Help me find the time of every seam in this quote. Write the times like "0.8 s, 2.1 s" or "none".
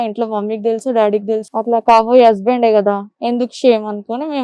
1.5 s